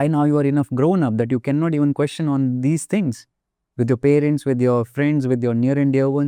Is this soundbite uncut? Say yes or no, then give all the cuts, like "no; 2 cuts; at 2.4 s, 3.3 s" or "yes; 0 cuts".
yes; 0 cuts